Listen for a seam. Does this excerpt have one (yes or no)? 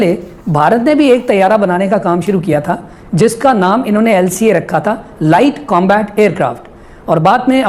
no